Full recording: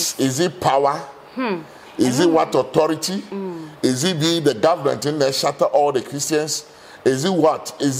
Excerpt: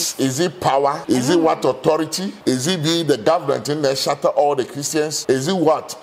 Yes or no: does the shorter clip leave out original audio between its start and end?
yes